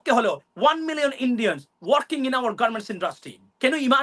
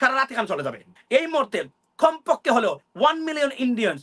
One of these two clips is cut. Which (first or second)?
second